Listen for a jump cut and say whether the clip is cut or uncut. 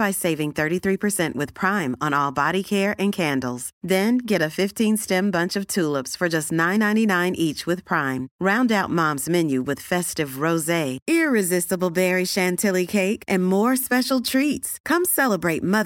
uncut